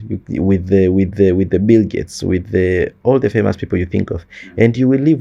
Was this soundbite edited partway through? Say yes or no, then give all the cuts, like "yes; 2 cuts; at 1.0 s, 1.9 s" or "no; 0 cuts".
no; 0 cuts